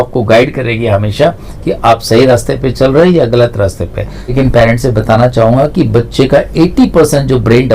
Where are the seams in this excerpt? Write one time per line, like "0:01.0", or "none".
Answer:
0:04.2